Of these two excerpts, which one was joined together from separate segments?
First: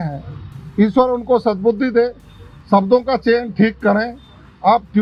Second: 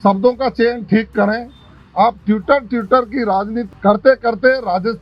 second; 1 cut; at 3.7 s

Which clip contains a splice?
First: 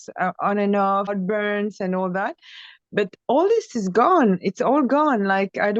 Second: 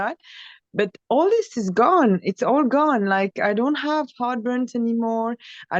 first; 1 cut; at 1.1 s

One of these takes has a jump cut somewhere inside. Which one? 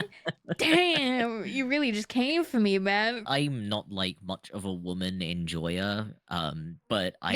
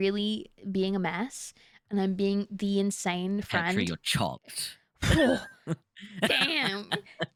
first; 1 cut; at 3.2 s

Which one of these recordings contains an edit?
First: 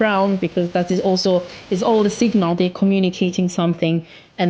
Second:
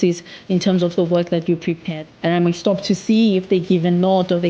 second; 1 cut; at 2.0 s

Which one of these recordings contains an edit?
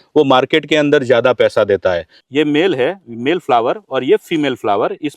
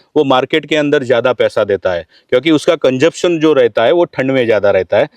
first; 1 cut; at 2.1 s

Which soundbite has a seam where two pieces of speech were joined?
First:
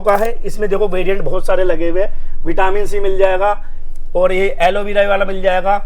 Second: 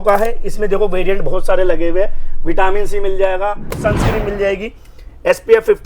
second; 1 cut; at 3.7 s

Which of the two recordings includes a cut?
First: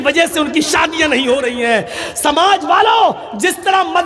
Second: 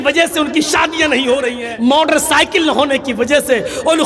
second; 1 cut; at 1.6 s

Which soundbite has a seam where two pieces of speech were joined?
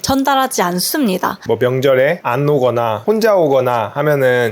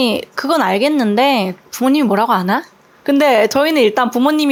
first; 3 cuts; at 1.4 s, 2.2 s, 3.0 s

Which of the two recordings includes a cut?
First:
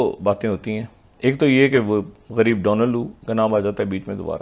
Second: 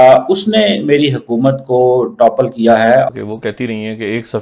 second; 1 cut; at 3.1 s

